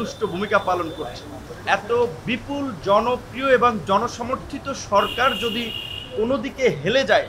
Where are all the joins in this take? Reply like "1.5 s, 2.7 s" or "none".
1.4 s